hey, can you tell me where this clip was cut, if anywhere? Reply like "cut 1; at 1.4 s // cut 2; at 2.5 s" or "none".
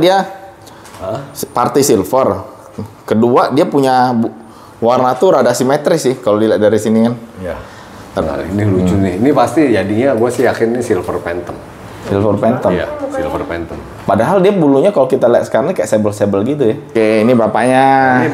cut 1; at 8.2 s // cut 2; at 16.9 s